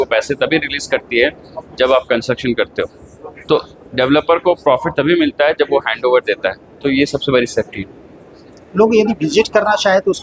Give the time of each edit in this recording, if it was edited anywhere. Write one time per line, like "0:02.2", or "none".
none